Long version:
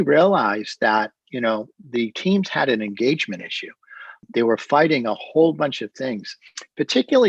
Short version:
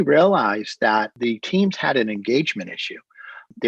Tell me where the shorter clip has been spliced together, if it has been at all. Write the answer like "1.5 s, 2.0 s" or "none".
1.1 s